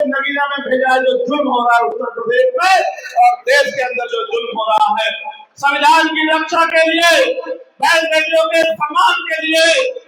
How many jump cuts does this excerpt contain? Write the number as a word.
zero